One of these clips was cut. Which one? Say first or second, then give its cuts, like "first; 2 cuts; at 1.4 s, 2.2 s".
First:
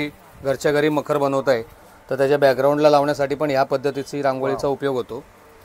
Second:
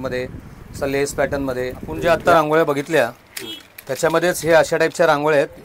second; 1 cut; at 1.9 s